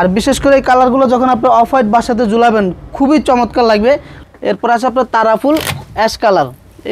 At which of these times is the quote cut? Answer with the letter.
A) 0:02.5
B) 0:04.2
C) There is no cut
B